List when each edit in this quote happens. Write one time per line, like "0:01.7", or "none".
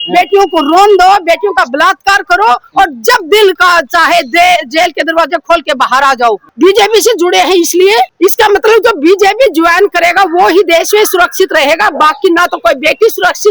0:06.5
0:08.1